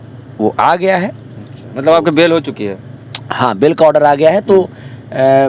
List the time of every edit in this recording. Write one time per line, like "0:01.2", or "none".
none